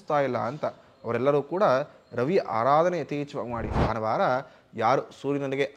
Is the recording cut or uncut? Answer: cut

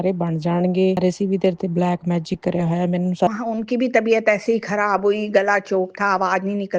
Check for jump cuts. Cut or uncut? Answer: cut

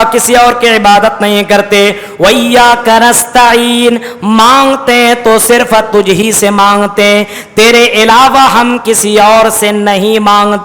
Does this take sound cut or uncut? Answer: uncut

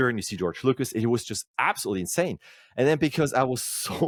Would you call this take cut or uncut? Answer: uncut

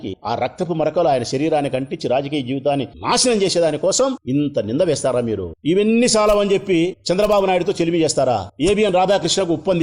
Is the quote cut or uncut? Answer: uncut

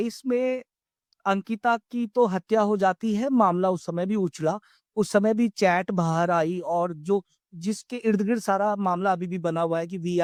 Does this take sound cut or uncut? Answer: uncut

